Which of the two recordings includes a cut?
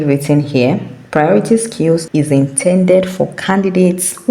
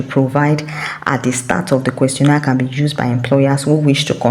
first; 1 cut; at 2.0 s

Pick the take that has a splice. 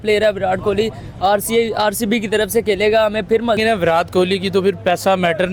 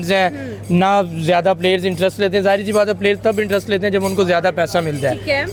first; 1 cut; at 3.6 s

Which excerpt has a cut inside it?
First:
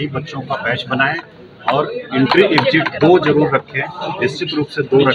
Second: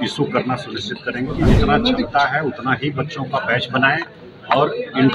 second; 1 cut; at 1.4 s

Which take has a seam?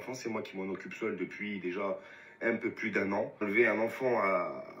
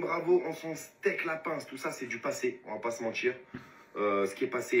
first; 1 cut; at 3.4 s

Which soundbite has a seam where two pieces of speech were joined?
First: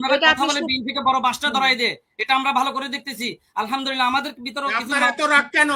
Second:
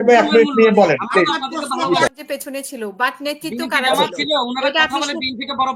second; 1 cut; at 2.1 s

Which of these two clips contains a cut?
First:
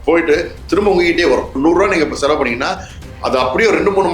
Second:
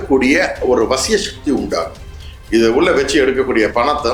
first; 1 cut; at 1.5 s

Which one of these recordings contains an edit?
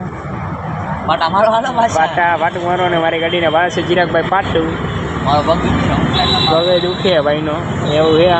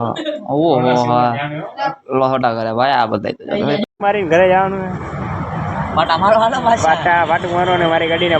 second; 1 cut; at 3.9 s

